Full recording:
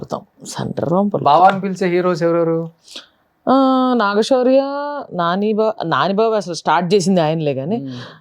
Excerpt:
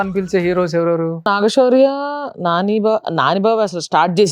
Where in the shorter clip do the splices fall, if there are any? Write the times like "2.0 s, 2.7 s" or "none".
1.3 s